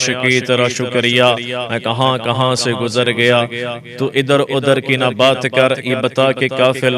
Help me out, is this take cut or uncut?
uncut